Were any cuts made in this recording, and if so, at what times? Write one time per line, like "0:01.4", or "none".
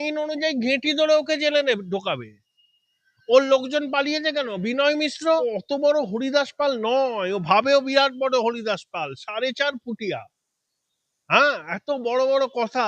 0:05.4